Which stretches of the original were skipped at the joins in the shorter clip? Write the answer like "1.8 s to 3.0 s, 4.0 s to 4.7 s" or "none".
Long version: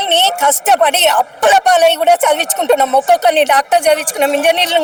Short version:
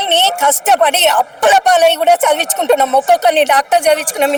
none